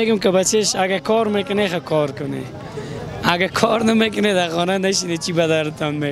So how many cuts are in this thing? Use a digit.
0